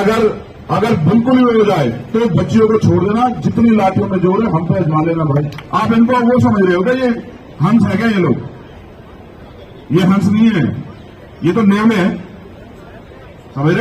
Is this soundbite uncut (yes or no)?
no